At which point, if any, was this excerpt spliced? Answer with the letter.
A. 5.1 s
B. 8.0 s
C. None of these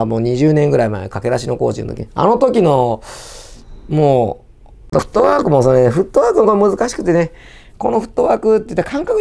A